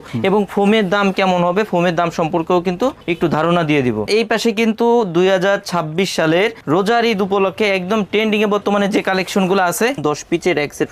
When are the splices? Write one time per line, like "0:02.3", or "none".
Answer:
0:04.1
0:10.0